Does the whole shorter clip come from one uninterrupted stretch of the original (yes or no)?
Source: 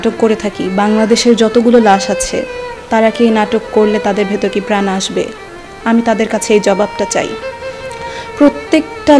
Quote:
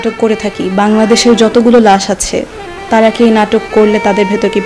yes